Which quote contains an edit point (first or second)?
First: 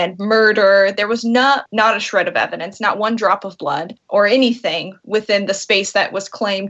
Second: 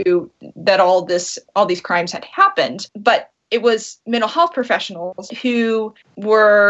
second